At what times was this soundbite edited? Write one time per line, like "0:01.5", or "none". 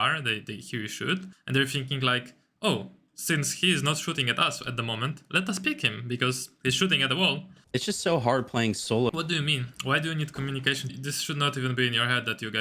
0:01.3
0:07.5
0:09.1
0:10.9